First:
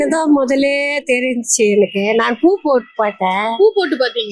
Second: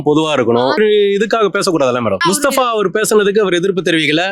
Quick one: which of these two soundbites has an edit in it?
second; 2 cuts; at 0.8 s, 2.2 s

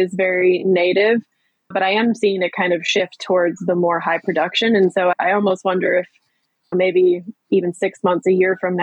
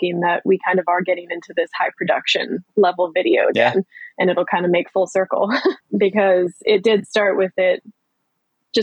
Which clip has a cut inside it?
second; 1 cut; at 5.8 s

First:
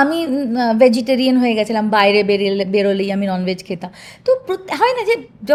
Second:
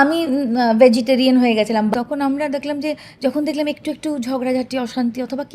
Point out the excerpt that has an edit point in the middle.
second; 1 cut; at 1.9 s

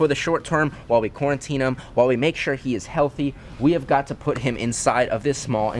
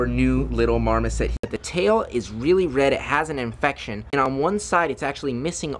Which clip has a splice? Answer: second; 2 cuts; at 1.4 s, 4.3 s

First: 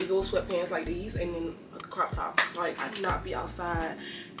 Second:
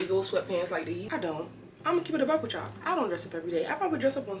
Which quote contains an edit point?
second; 1 cut; at 1.0 s

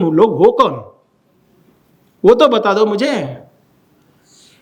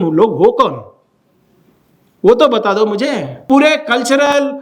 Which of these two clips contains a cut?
second; 1 cut; at 3.3 s

